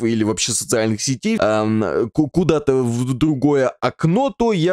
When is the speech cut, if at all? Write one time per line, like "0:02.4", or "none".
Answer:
0:01.4